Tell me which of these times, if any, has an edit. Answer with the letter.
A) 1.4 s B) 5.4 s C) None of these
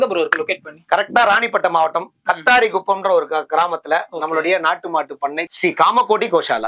B